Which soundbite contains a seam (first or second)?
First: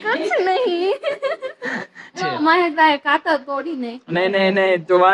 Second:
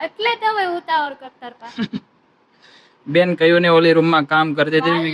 first